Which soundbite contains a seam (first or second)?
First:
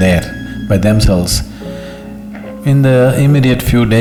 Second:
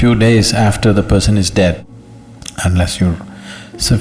second